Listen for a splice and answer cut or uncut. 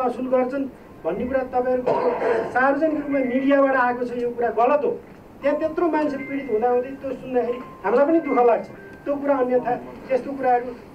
uncut